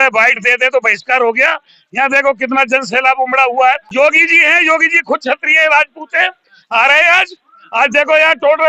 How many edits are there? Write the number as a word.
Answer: one